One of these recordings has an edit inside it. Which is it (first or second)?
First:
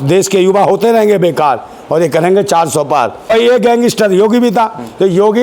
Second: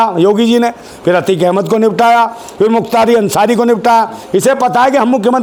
first